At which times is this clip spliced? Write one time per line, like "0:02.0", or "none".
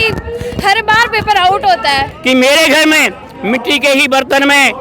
0:02.1